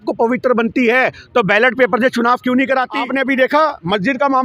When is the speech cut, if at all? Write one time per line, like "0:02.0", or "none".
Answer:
0:03.0